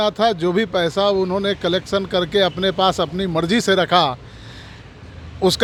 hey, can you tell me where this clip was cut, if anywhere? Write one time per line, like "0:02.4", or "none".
none

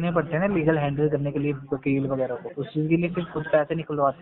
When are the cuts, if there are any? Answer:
0:02.5

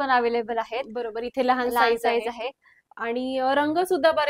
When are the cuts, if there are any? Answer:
none

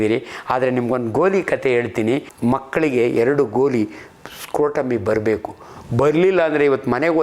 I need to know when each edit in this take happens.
0:02.3

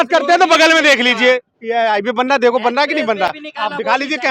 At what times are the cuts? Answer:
none

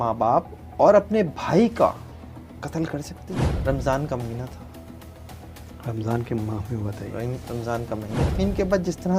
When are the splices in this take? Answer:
0:03.5
0:08.3

